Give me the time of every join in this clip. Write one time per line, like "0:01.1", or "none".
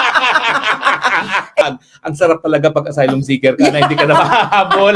0:01.6